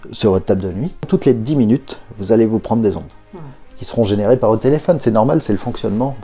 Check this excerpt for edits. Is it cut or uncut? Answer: cut